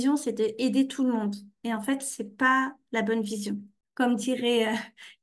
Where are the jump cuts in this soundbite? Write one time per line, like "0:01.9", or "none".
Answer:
0:03.8